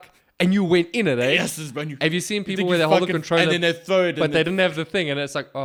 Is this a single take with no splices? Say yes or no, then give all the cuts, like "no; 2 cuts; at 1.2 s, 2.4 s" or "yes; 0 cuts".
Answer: yes; 0 cuts